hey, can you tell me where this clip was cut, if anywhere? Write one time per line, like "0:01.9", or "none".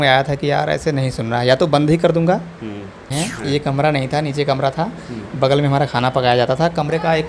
0:03.0